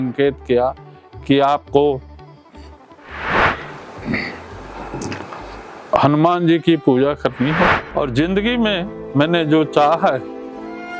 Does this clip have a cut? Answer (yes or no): yes